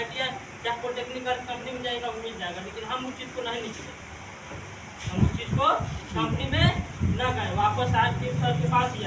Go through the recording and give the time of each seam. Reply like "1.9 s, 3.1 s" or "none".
none